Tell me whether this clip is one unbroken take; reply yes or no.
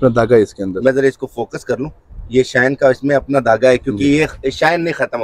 yes